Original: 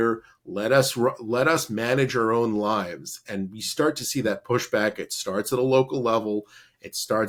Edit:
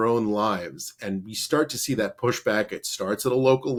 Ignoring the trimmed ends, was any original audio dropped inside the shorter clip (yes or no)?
no